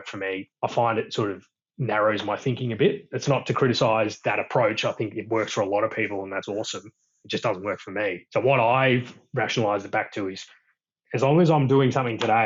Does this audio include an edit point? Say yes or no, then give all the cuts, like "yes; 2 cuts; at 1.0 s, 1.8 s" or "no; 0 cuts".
no; 0 cuts